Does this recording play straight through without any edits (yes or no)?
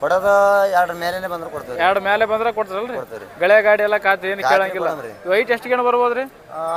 yes